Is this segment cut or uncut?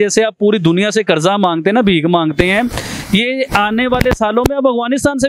uncut